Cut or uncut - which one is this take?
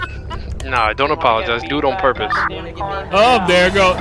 uncut